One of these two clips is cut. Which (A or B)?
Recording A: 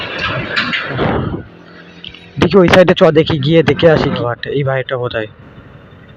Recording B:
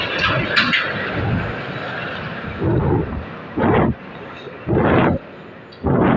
A